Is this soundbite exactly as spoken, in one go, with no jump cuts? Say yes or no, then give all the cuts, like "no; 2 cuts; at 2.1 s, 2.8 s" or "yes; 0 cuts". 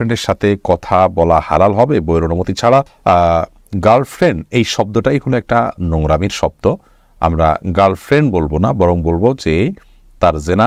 yes; 0 cuts